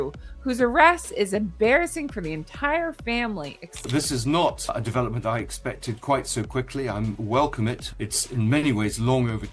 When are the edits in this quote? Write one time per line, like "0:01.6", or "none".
0:03.7